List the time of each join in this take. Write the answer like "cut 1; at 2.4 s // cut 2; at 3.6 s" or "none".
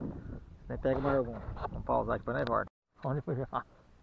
cut 1; at 2.8 s